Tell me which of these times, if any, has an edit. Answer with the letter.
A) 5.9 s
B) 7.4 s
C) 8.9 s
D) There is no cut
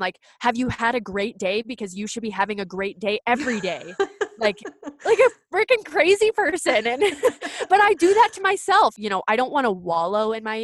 C